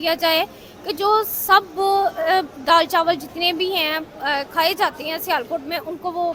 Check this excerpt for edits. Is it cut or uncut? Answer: uncut